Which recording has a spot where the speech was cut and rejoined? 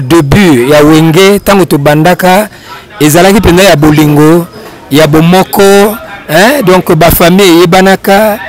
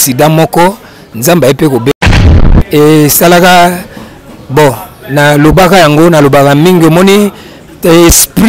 second; 1 cut; at 2.2 s

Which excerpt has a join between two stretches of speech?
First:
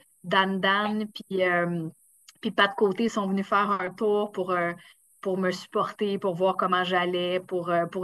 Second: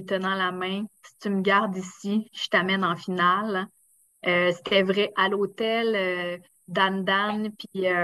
second; 1 cut; at 5.1 s

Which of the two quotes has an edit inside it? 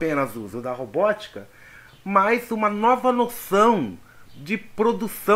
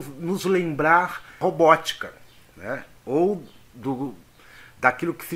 second; 1 cut; at 1.4 s

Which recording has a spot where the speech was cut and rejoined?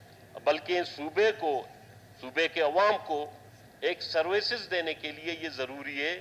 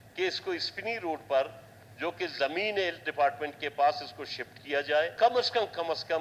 second; 1 cut; at 5.1 s

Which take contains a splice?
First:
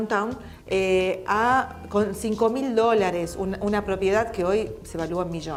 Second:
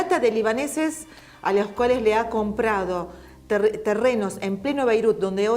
second; 1 cut; at 4.7 s

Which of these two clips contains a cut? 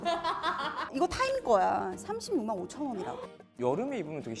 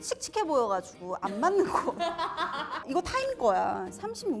first; 1 cut; at 3.5 s

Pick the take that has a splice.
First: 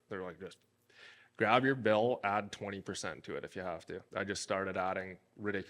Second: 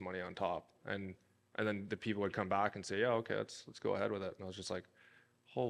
first; 1 cut; at 4.0 s

